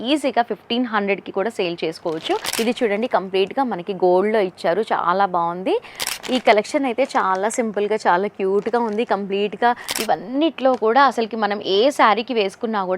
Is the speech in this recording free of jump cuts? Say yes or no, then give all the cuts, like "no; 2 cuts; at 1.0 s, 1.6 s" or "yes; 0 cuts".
no; 3 cuts; at 2.5 s, 6.1 s, 9.9 s